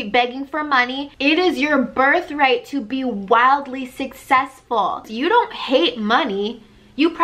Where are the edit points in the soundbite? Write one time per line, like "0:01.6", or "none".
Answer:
0:01.0
0:05.1

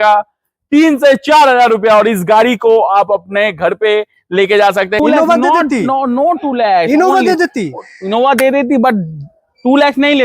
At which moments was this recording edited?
0:05.0

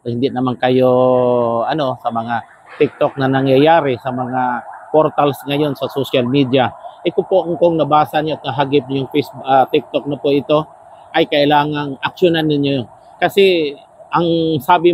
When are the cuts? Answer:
none

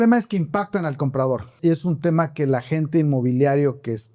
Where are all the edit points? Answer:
0:01.5

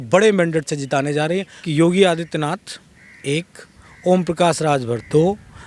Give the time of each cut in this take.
0:01.6

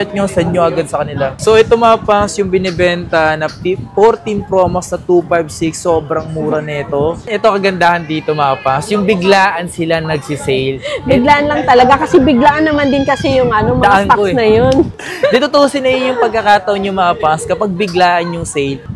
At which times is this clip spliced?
0:01.3
0:07.2
0:14.9

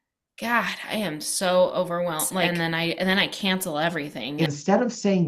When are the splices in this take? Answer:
0:02.5
0:04.2

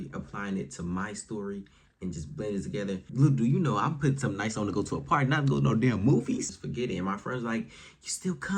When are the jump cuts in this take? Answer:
0:03.1
0:06.6

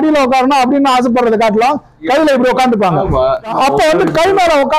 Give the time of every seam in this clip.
0:03.5

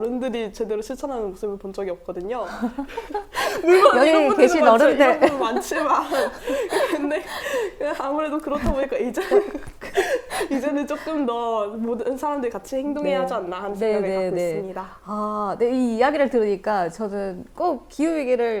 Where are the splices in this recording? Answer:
none

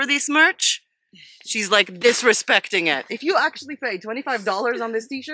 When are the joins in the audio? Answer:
none

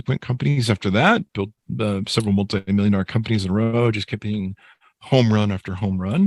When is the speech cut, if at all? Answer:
none

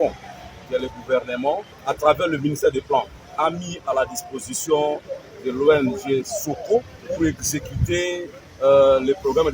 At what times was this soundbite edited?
0:01.7
0:07.0
0:08.4

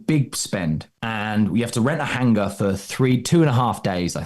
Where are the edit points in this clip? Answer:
0:00.9

